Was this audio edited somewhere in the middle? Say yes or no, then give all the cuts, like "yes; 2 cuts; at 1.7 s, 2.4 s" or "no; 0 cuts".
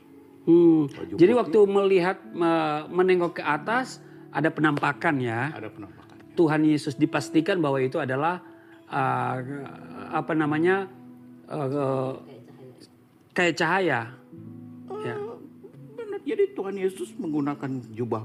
no; 0 cuts